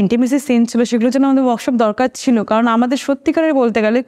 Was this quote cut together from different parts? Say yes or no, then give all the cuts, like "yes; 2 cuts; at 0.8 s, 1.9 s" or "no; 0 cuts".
no; 0 cuts